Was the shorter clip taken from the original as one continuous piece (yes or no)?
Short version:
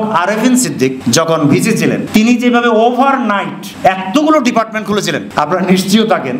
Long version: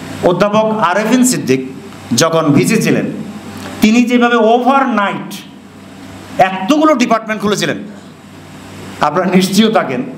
no